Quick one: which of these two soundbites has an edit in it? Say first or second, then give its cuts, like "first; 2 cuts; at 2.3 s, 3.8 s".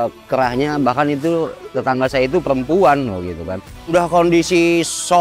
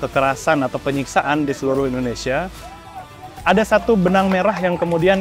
first; 1 cut; at 3.9 s